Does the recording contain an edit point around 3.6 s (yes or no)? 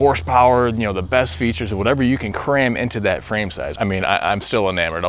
yes